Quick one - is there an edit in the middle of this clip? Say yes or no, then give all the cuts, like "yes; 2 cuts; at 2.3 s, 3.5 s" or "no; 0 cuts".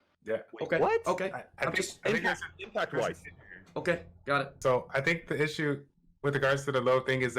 yes; 1 cut; at 4.5 s